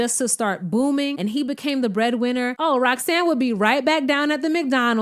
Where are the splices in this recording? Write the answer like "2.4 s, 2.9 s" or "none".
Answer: 1.1 s, 2.5 s